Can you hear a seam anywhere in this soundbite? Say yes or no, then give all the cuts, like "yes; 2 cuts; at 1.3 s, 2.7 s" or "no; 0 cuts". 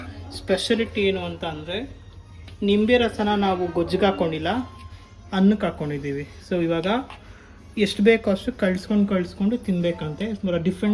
no; 0 cuts